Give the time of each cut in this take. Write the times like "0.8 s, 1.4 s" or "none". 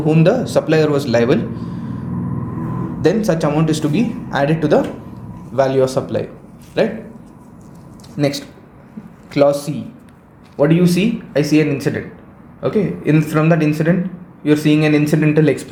none